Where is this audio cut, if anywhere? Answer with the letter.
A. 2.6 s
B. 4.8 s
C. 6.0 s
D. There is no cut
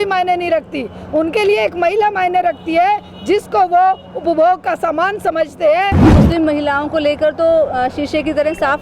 C